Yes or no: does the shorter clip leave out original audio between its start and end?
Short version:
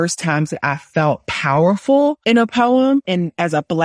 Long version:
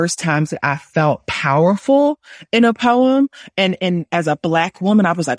yes